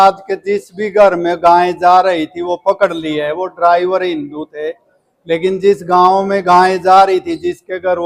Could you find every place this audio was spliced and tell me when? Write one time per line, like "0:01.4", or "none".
none